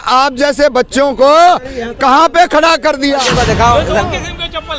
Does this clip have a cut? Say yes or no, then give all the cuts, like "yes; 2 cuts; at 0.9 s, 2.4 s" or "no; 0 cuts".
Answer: yes; 1 cut; at 3.3 s